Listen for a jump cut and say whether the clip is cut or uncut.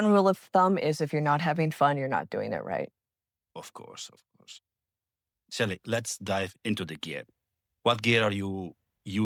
uncut